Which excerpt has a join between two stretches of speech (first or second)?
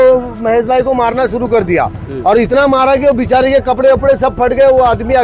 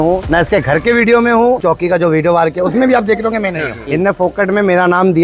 second